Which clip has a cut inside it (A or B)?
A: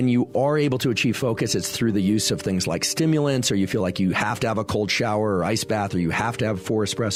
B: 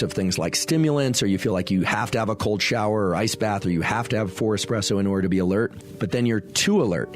B